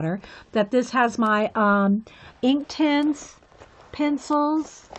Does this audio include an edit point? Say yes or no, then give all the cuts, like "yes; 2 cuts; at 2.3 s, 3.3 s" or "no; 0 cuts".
yes; 1 cut; at 1.4 s